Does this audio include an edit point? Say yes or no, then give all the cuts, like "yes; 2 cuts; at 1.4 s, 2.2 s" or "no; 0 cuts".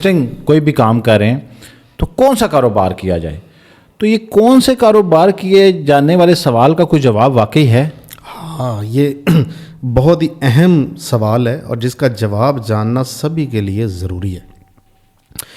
no; 0 cuts